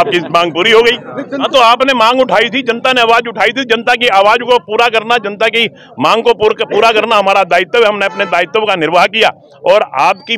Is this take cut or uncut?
cut